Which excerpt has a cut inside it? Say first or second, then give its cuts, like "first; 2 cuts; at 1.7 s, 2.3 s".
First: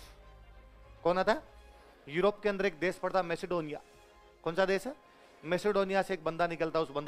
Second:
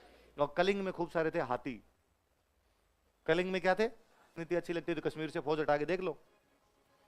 second; 1 cut; at 4.4 s